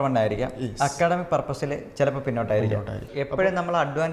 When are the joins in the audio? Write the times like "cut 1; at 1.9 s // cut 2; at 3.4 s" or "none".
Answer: cut 1; at 3.1 s